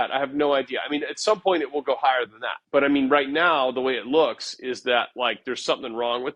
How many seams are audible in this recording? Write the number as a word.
zero